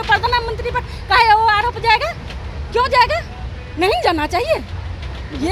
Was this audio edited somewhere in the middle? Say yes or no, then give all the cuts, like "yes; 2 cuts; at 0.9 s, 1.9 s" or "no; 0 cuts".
no; 0 cuts